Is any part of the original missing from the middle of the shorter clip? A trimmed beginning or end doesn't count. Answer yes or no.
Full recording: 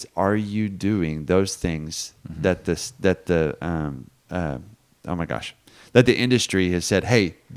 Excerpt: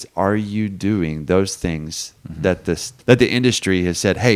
yes